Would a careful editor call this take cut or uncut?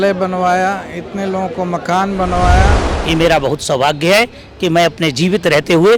cut